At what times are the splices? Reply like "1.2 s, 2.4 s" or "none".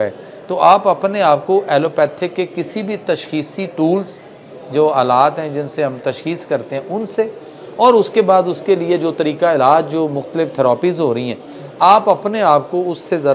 none